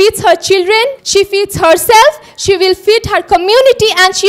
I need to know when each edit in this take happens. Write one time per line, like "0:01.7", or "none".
0:01.0